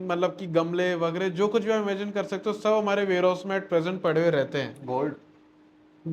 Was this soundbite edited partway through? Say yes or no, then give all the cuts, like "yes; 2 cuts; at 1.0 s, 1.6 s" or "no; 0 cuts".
no; 0 cuts